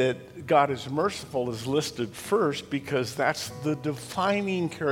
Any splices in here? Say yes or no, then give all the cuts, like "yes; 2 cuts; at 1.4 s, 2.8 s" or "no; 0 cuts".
no; 0 cuts